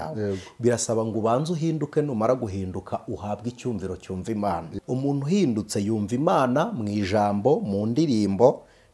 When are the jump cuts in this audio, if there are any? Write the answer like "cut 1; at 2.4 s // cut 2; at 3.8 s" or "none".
cut 1; at 4.7 s